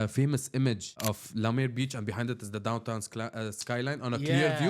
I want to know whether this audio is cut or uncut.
cut